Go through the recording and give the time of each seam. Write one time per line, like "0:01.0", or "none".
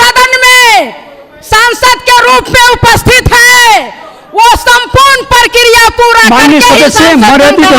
none